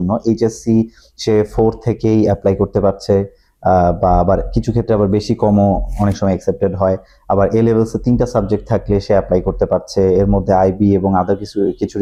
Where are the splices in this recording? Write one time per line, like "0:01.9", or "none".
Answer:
none